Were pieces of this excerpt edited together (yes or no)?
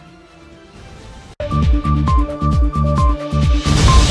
no